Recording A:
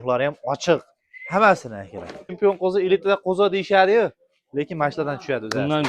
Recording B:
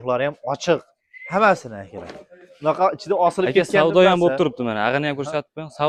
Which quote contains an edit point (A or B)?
A